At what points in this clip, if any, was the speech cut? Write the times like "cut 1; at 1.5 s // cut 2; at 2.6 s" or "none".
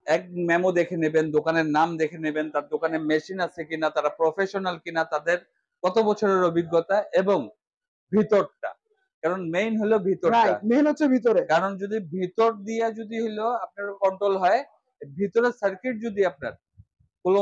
none